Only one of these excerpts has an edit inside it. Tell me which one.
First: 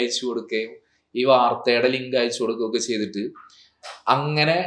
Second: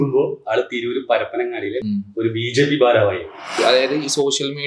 second; 2 cuts; at 1.8 s, 3.6 s

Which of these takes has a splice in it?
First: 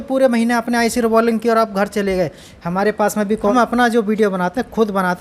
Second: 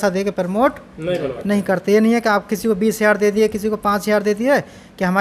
first; 1 cut; at 3.5 s

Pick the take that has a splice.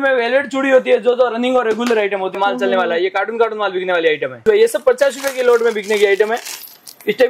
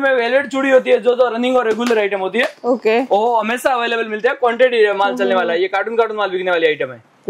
first; 2 cuts; at 2.3 s, 4.4 s

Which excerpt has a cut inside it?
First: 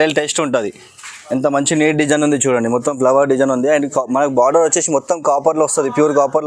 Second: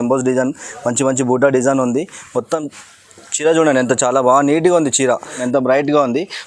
second; 1 cut; at 5.4 s

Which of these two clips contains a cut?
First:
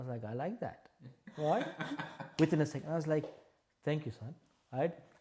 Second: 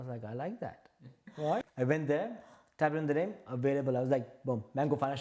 second; 1 cut; at 1.7 s

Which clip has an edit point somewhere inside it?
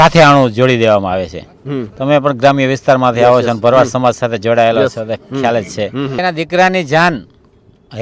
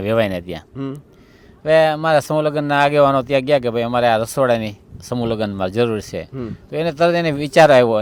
first; 1 cut; at 6.2 s

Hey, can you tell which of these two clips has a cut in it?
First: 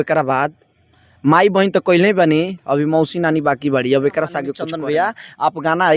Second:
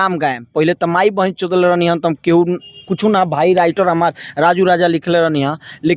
first; 1 cut; at 4.6 s

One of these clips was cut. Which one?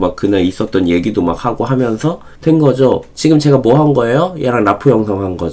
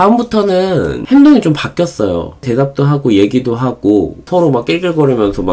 second; 3 cuts; at 1.0 s, 2.4 s, 4.2 s

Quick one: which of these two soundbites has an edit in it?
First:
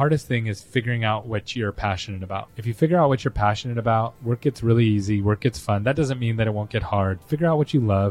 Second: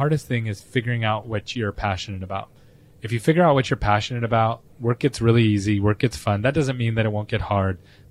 first; 3 cuts; at 2.6 s, 4.2 s, 7.2 s

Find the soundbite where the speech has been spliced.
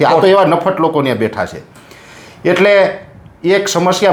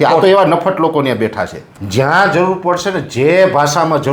second; 1 cut; at 1.7 s

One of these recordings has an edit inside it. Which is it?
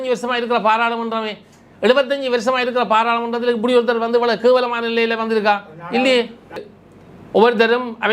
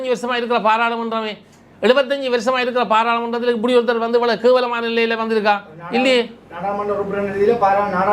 first; 1 cut; at 6.6 s

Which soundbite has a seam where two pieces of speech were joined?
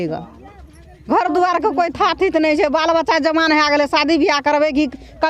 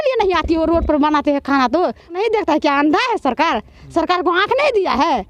second; 1 cut; at 2.1 s

